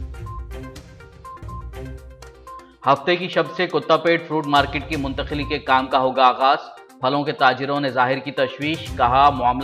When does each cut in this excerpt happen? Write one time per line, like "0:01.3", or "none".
0:00.9
0:02.5